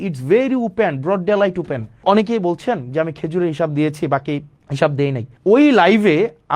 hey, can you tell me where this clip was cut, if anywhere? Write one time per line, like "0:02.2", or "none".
0:02.0
0:04.6
0:05.3